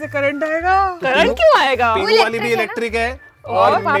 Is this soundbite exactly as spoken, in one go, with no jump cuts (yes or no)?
yes